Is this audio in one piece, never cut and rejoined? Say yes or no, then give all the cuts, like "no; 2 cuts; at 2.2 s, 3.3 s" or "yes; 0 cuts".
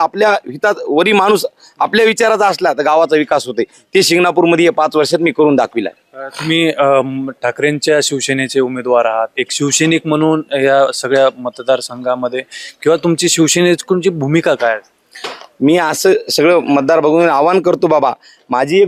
yes; 0 cuts